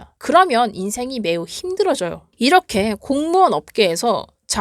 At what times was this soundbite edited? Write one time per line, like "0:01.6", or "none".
0:02.2